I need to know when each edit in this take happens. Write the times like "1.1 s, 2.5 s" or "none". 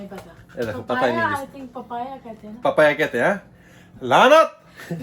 none